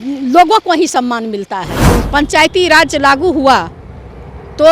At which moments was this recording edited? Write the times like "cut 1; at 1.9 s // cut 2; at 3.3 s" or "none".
cut 1; at 1.7 s